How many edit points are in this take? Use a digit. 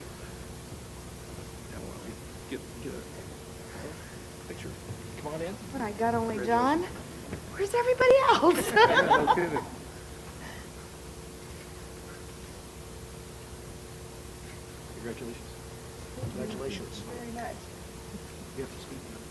0